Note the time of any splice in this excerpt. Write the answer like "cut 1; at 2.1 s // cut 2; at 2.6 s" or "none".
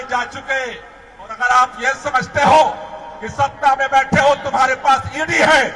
cut 1; at 1.3 s